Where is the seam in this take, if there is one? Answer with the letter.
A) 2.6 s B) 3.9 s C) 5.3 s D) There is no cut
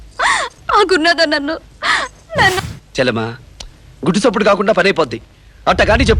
A